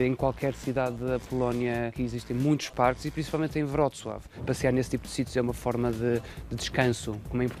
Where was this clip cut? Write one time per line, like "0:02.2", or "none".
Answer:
0:01.9
0:04.4